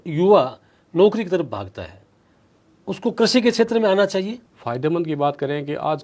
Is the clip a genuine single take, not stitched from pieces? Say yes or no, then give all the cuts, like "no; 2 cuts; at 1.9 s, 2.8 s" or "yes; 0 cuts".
no; 1 cut; at 4.4 s